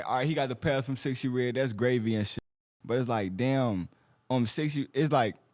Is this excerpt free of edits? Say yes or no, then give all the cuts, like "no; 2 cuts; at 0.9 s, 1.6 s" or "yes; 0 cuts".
yes; 0 cuts